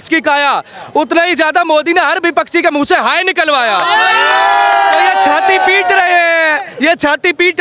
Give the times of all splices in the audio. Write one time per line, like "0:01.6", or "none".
none